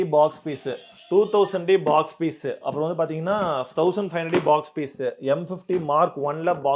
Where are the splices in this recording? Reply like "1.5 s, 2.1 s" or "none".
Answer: none

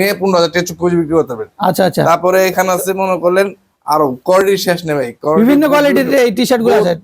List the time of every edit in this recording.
none

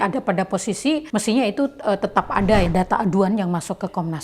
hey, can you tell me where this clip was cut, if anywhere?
1.1 s, 2.7 s

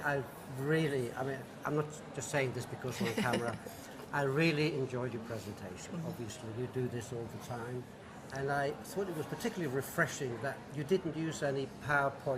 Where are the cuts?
6.2 s

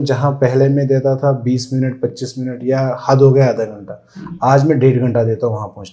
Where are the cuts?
none

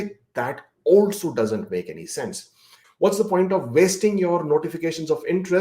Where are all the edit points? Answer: 2.8 s

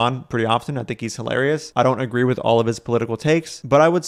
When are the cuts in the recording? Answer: none

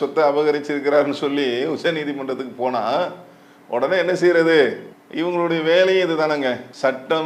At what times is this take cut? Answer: none

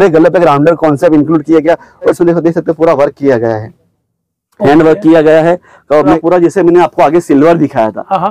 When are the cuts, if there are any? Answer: 2.2 s, 6.2 s

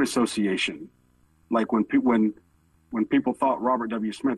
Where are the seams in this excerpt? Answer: none

